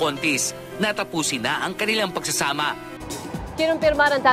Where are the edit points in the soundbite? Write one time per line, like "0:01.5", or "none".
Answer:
0:03.0